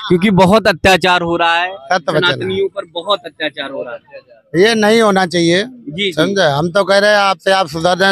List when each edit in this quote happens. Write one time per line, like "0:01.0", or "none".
none